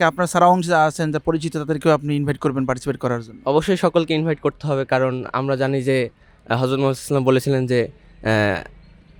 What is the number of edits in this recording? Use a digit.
0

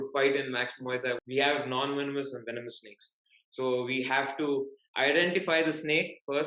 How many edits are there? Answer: 1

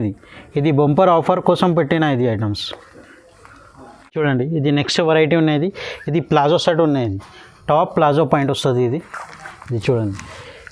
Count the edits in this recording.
0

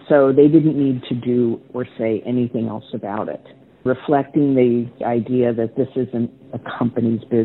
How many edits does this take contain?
2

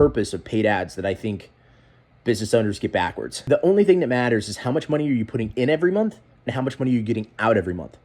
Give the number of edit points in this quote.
1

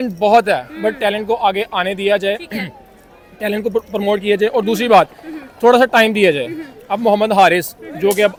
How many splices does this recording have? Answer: 0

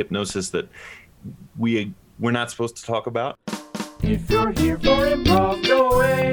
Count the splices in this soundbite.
1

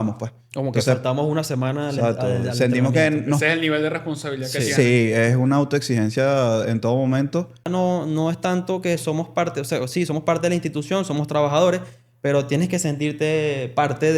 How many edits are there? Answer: 1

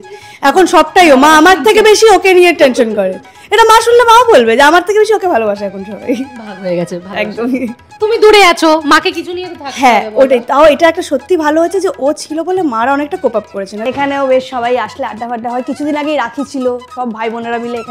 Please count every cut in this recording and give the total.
1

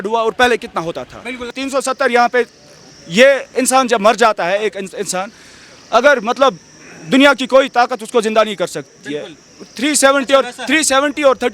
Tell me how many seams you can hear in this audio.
1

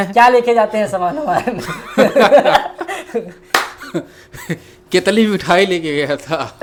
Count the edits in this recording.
0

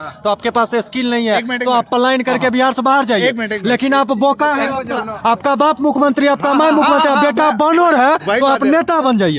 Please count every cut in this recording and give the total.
0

